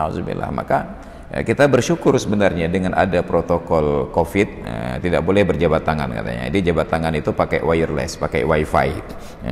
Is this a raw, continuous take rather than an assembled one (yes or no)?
yes